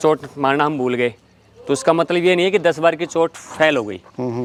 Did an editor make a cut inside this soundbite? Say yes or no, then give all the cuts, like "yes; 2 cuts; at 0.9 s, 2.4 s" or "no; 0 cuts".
no; 0 cuts